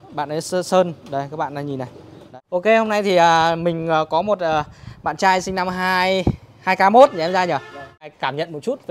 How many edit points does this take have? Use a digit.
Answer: 2